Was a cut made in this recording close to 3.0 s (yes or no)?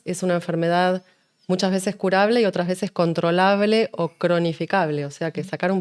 no